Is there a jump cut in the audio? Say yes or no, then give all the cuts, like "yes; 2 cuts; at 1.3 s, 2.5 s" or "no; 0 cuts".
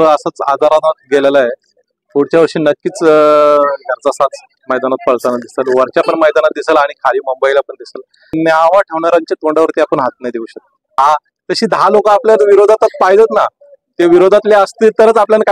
yes; 2 cuts; at 8.3 s, 10.9 s